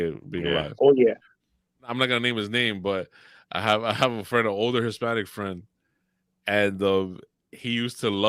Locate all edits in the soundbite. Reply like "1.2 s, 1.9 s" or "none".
1.9 s